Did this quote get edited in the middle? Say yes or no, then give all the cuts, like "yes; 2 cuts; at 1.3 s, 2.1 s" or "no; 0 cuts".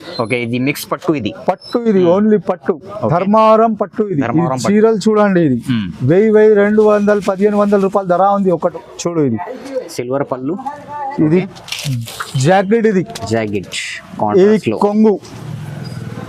yes; 1 cut; at 8.7 s